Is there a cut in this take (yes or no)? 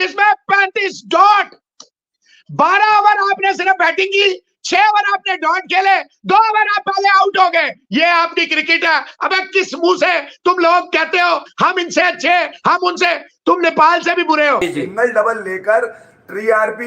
yes